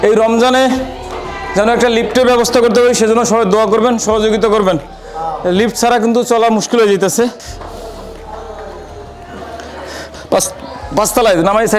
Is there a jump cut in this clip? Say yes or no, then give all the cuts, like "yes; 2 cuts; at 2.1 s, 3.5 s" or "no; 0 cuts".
no; 0 cuts